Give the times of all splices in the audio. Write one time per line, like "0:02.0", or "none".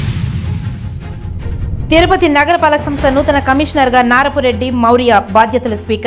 none